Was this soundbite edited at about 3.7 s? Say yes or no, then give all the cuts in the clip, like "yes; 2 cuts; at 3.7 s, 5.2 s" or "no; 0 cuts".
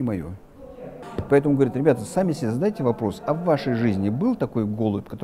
no; 1 cut; at 1.1 s